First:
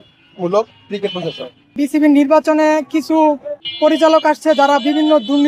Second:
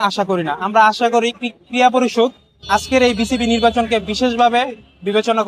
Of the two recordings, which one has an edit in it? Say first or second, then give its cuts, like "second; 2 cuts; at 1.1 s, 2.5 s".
first; 2 cuts; at 1.7 s, 3.6 s